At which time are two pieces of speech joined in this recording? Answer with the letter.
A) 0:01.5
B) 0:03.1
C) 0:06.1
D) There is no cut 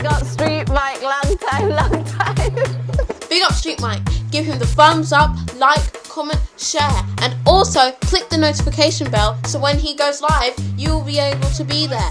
D